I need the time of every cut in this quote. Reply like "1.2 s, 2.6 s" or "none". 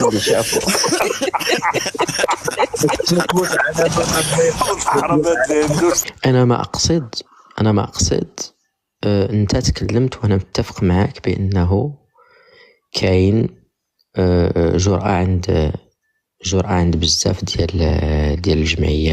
6.0 s